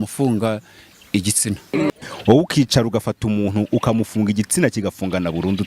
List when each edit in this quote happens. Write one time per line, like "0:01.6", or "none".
0:02.0